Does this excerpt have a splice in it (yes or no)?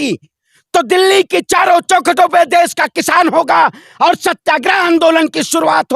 no